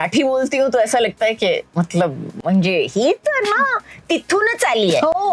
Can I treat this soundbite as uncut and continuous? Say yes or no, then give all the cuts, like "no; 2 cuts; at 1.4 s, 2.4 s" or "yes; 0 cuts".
yes; 0 cuts